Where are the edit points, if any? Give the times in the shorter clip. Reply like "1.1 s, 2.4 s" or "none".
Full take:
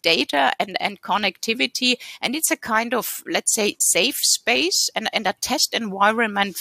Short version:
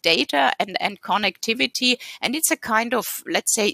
none

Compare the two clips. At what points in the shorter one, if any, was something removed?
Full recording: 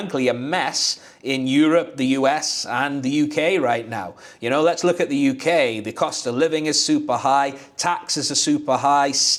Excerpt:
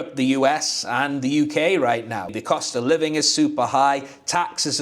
2.3 s

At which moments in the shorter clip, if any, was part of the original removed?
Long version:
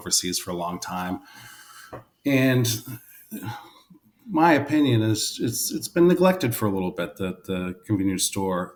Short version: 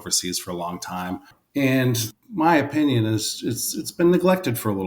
1.4 s, 2.1 s

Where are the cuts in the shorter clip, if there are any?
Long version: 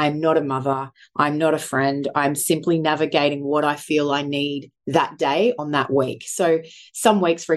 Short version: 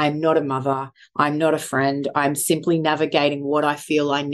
none

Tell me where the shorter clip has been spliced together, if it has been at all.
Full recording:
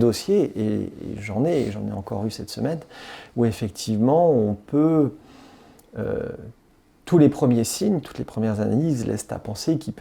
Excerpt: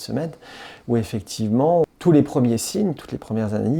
1.9 s

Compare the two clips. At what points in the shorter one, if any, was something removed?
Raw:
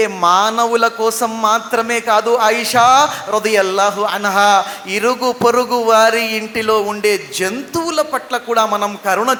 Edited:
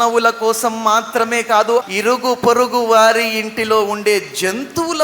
1.8 s

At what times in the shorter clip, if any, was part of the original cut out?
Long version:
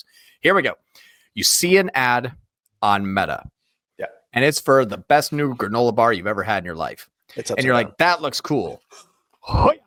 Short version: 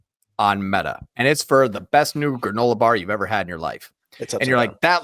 1.1 s

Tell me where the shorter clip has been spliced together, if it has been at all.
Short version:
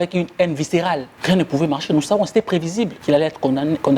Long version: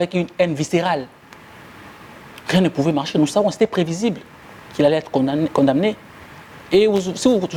1.1 s, 3.0 s

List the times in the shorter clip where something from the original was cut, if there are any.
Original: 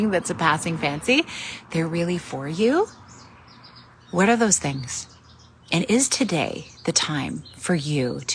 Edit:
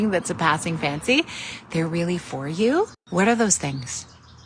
3.0 s

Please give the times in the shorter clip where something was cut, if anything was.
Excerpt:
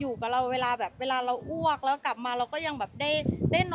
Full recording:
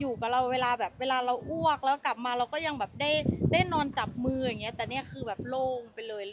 none

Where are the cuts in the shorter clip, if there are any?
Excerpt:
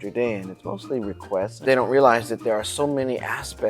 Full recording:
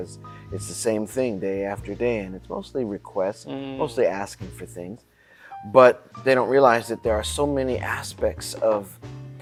1.5 s

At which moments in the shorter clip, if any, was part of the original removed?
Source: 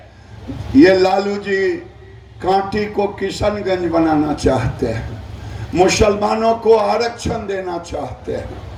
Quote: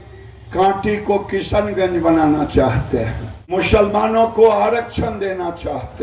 3.6 s

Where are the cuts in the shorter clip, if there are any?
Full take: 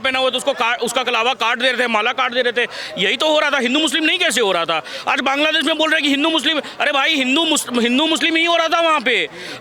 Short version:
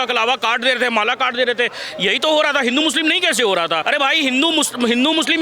3.8 s

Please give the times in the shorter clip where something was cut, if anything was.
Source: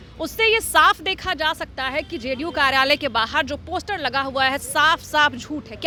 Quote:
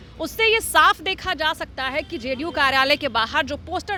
none

